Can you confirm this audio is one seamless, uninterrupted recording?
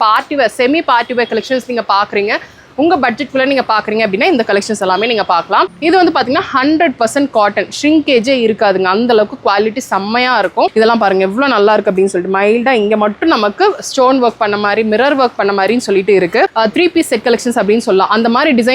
no; 3 cuts; at 5.7 s, 10.7 s, 16.5 s

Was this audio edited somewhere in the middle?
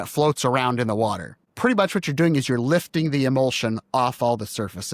yes; 1 cut; at 1.4 s

